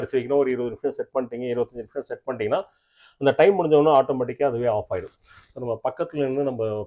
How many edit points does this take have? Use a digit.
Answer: 0